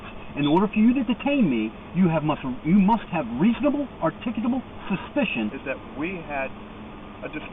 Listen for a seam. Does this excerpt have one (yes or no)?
yes